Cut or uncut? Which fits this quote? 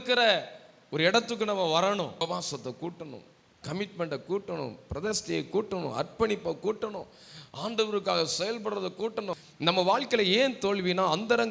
cut